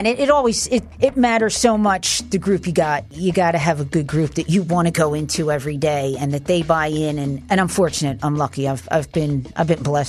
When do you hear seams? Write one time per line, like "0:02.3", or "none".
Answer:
0:03.1